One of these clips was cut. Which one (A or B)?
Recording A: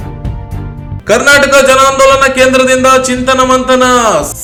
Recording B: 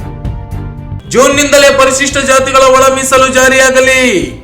B